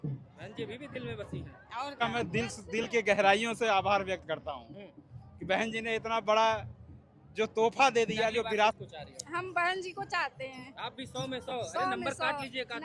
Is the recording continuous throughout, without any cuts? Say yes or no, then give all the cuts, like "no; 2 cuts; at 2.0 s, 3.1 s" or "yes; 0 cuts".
no; 2 cuts; at 2.0 s, 8.7 s